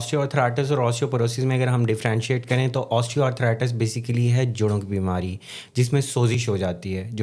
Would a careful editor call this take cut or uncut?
uncut